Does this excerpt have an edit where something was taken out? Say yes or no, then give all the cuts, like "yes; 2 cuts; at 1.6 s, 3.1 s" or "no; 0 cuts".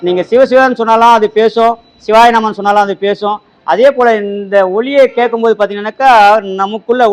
no; 0 cuts